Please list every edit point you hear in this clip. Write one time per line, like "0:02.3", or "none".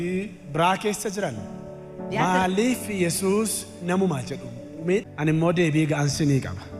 0:05.1